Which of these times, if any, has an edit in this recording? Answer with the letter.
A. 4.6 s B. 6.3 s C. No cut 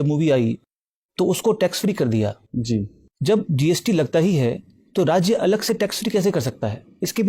C